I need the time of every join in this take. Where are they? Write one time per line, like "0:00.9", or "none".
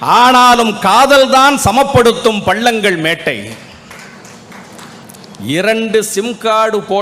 0:05.0